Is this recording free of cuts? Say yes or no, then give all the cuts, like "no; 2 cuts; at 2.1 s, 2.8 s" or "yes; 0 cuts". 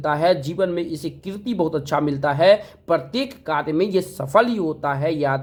yes; 0 cuts